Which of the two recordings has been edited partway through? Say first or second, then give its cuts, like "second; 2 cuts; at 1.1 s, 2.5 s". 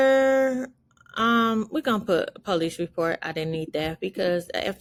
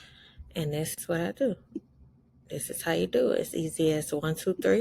second; 1 cut; at 1.0 s